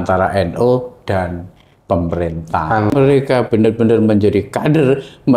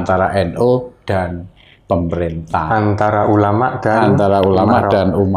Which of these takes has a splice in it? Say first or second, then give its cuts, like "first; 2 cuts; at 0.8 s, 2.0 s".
first; 1 cut; at 2.9 s